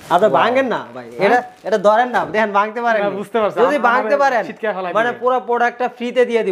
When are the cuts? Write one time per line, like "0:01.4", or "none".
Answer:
none